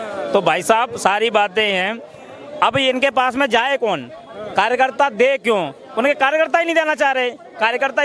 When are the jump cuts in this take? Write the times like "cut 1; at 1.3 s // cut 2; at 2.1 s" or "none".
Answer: none